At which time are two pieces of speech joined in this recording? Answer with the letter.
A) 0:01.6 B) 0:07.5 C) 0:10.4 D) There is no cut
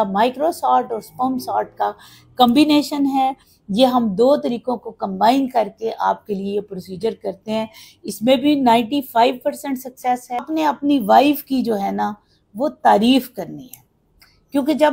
C